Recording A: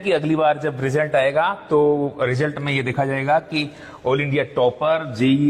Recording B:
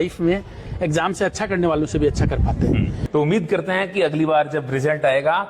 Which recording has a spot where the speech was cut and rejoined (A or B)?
B